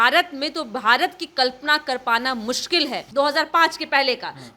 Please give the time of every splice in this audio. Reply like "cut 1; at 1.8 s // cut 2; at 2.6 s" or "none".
cut 1; at 3.0 s